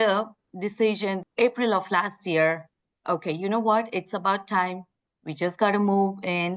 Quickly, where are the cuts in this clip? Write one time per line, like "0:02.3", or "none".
none